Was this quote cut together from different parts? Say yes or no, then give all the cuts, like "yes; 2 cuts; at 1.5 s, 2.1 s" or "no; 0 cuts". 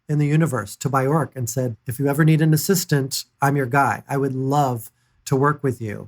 yes; 1 cut; at 1.7 s